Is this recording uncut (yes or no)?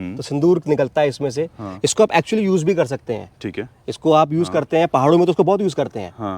yes